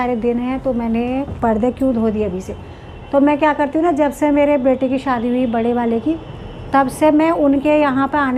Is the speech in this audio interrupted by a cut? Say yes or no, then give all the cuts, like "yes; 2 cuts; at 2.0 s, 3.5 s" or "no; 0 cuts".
no; 0 cuts